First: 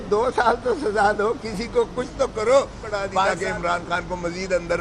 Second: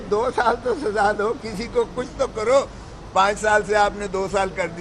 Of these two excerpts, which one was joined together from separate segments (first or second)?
first